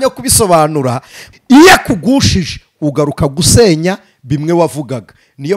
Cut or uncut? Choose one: cut